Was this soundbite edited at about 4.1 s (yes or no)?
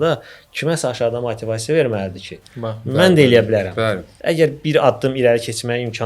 yes